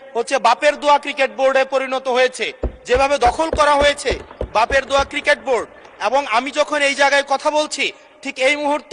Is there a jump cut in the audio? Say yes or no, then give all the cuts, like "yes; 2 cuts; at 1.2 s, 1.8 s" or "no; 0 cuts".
no; 0 cuts